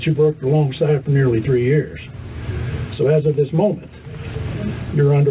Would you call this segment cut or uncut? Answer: uncut